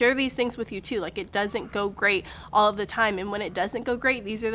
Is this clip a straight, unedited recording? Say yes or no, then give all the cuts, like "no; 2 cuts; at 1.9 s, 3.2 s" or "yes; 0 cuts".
yes; 0 cuts